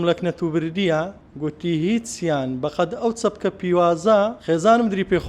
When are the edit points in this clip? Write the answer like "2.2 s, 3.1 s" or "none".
1.2 s, 4.4 s